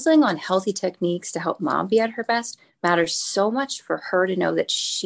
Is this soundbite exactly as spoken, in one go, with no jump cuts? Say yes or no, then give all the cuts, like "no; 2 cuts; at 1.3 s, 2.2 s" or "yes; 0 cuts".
yes; 0 cuts